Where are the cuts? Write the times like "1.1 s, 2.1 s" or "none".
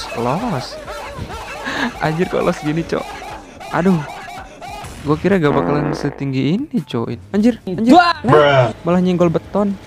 7.1 s

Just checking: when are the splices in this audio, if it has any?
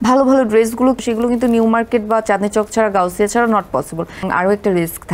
1.0 s, 4.3 s

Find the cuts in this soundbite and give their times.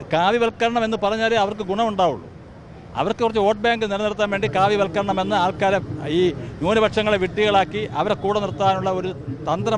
none

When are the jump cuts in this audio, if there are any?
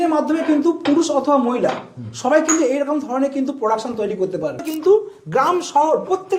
4.7 s

